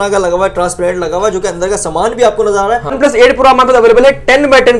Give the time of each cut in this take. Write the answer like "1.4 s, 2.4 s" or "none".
2.9 s